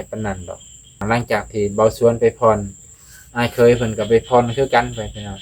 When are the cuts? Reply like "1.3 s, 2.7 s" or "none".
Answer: 1.0 s